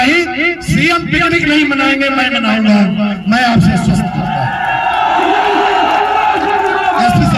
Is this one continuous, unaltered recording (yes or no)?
yes